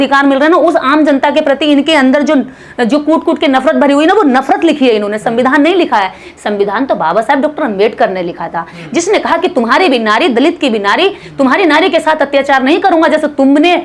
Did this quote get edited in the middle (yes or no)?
no